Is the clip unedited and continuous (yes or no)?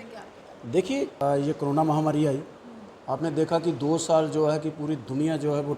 no